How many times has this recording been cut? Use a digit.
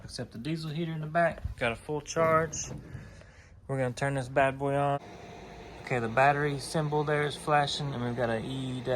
1